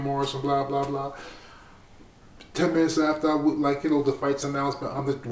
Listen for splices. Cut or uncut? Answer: uncut